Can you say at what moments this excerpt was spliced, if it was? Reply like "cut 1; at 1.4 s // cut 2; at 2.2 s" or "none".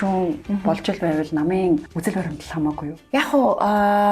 cut 1; at 1.9 s // cut 2; at 3.0 s